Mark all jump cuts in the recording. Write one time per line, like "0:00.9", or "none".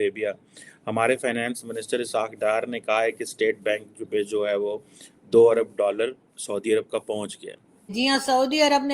0:07.9